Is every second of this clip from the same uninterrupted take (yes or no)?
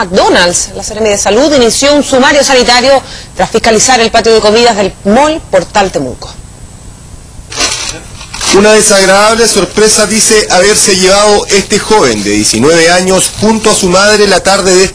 yes